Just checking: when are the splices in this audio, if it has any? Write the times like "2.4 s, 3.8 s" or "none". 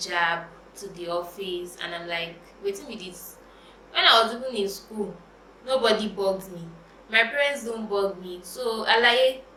none